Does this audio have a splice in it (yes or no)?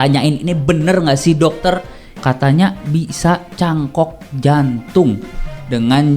yes